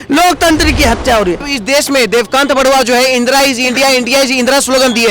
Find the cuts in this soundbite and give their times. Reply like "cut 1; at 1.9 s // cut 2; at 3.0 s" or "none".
cut 1; at 1.4 s